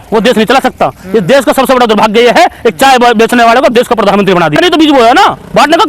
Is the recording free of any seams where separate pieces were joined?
no; 1 cut; at 4.6 s

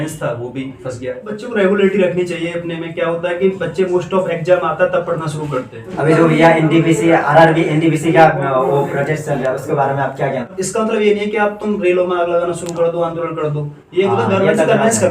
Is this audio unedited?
no; 3 cuts; at 1.3 s, 5.8 s, 10.5 s

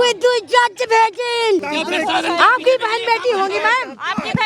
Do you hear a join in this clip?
yes; 1 cut; at 1.7 s

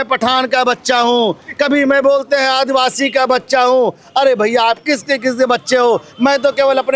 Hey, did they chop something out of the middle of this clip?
no; 0 cuts

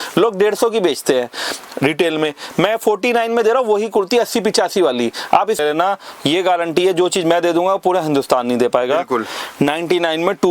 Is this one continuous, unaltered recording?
no; 1 cut; at 5.6 s

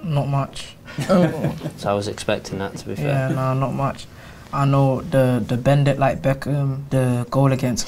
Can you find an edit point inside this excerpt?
yes; 1 cut; at 6.8 s

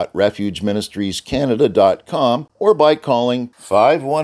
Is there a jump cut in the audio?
yes; 1 cut; at 2.5 s

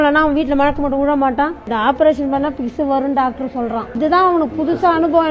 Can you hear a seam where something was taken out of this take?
yes; 2 cuts; at 1.6 s, 4.0 s

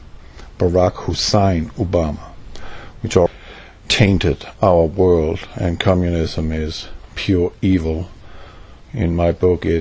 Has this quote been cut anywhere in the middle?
no; 0 cuts

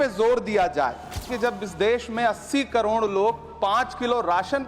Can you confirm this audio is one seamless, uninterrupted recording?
no; 1 cut; at 1.3 s

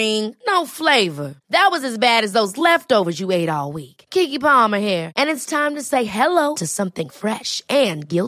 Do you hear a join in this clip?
no; 0 cuts

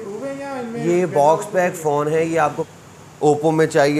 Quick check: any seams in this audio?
yes; 1 cut; at 2.6 s

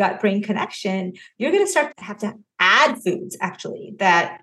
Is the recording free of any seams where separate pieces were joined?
no; 1 cut; at 1.9 s

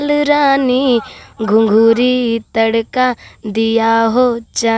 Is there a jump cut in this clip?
no; 0 cuts

